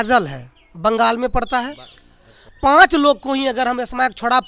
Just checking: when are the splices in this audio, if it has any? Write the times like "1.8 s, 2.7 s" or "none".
2.4 s